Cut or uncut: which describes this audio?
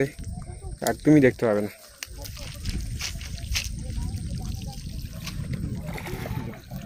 uncut